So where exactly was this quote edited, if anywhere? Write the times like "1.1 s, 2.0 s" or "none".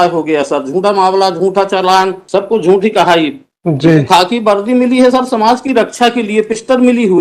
2.2 s